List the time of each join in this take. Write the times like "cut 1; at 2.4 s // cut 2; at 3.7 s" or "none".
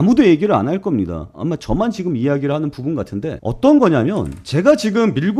none